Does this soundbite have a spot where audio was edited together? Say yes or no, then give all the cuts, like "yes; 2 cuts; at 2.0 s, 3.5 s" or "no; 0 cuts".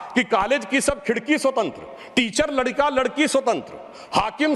no; 0 cuts